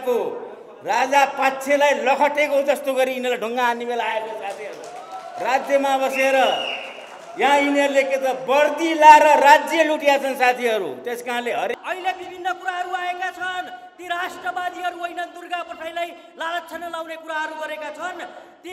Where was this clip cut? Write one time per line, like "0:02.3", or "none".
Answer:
0:11.7